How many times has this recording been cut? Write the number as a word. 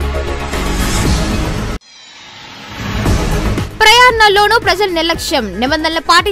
two